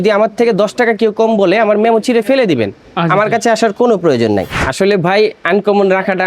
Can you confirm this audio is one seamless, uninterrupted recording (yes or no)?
no